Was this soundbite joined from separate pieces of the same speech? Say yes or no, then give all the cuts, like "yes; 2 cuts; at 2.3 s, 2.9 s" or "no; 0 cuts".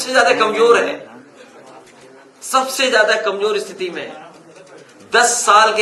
no; 0 cuts